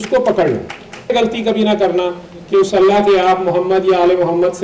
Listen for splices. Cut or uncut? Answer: cut